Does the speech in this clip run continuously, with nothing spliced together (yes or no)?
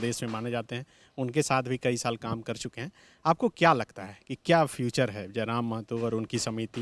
yes